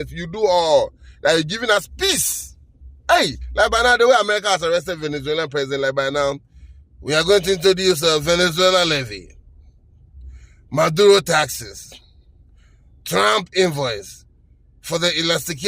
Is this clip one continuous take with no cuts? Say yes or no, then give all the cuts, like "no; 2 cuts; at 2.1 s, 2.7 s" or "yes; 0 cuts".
yes; 0 cuts